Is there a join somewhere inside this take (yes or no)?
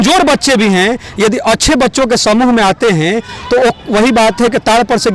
no